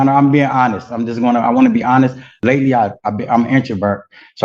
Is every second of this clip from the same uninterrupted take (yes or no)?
no